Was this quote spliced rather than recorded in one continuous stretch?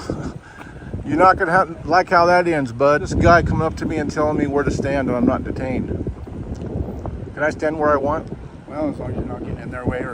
yes; 1 cut; at 3.1 s

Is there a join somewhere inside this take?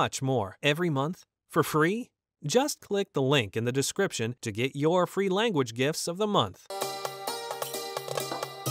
yes; 1 cut; at 6.7 s

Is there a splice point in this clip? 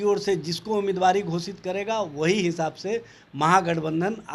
no; 0 cuts

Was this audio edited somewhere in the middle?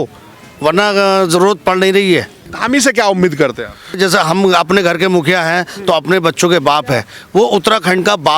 yes; 2 cuts; at 2.5 s, 4.0 s

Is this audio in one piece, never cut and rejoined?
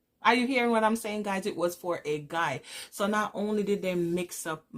yes; 0 cuts

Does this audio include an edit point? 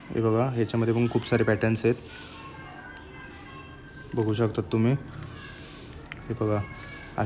no; 0 cuts

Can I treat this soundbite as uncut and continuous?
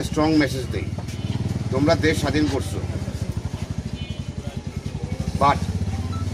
yes; 0 cuts

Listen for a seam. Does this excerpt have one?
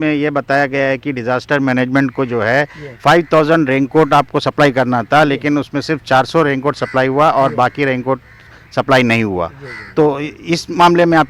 no; 0 cuts

